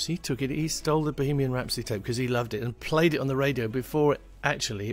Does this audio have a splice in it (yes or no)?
no